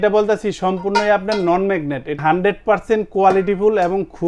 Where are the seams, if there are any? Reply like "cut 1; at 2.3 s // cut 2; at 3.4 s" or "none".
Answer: cut 1; at 2.2 s

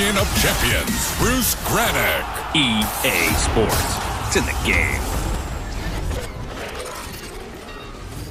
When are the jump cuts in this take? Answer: none

